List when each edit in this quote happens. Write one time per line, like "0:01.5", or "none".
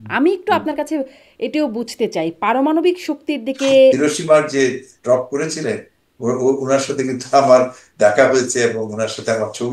0:04.0